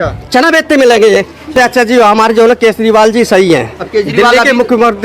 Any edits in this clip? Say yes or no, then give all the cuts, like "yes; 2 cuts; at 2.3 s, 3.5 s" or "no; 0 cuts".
yes; 1 cut; at 1.5 s